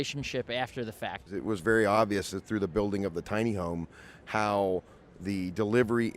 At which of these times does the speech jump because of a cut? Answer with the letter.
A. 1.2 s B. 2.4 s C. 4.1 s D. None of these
A